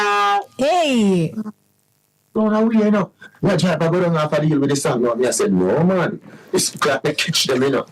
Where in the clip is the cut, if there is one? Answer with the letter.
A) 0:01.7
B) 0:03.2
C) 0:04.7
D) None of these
D